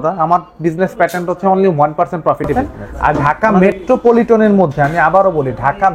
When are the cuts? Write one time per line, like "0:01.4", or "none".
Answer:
0:02.5